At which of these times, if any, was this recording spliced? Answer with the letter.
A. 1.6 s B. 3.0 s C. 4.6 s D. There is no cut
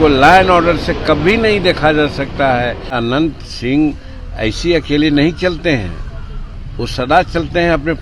B